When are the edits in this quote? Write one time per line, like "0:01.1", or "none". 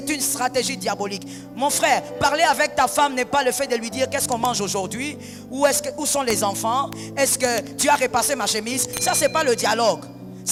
none